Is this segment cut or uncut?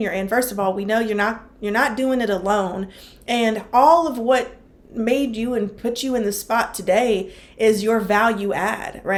uncut